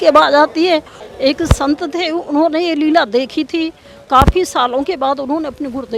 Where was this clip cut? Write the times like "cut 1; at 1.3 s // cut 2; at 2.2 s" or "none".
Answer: cut 1; at 1.0 s